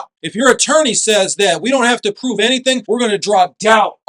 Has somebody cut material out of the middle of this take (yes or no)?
no